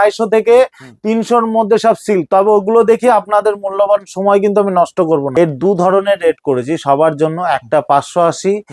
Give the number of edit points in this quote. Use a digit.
1